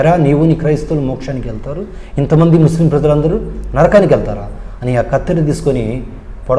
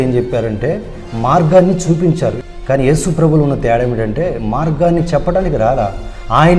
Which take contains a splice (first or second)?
second